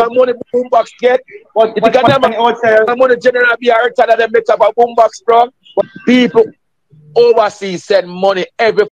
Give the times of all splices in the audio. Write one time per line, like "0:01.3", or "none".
0:05.9